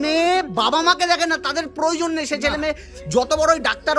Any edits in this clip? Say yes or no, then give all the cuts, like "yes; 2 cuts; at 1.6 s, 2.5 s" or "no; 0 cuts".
no; 0 cuts